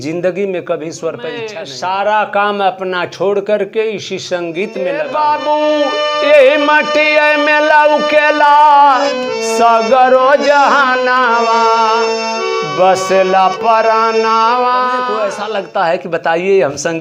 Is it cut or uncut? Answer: cut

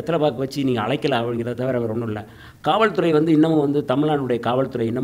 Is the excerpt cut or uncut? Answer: uncut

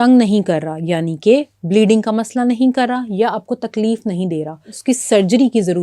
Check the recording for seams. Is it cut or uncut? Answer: cut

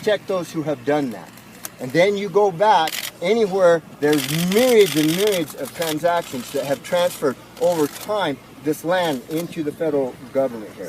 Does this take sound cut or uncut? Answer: cut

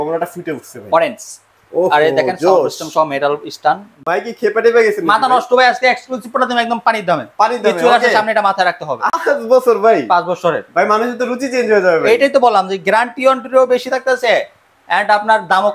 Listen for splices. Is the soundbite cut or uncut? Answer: cut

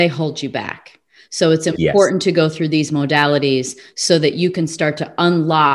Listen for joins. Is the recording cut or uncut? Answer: uncut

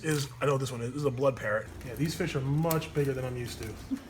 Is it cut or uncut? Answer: cut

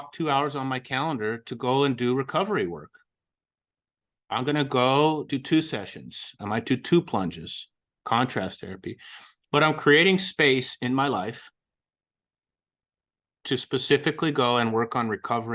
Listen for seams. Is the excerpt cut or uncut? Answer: cut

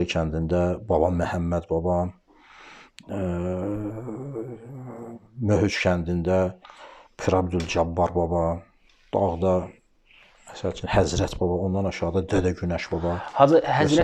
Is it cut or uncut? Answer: uncut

